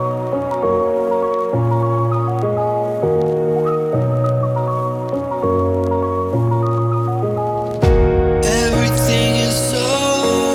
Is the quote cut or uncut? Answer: uncut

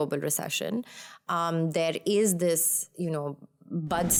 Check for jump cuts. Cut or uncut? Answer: uncut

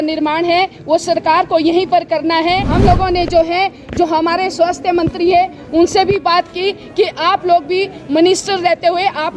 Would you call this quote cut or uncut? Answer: cut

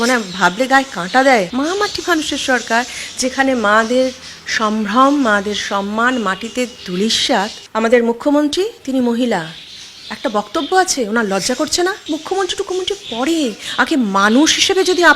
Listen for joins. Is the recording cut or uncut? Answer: cut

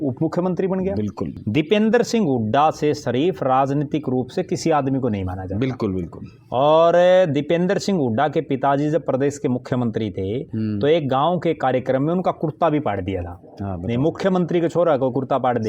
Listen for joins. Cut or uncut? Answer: cut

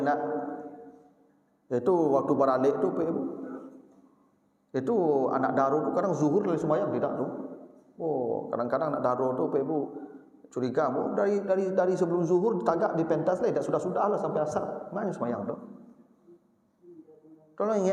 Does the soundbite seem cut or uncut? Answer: uncut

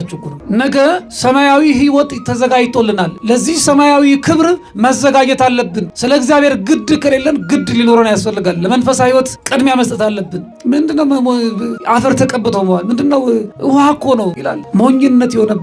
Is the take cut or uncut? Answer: cut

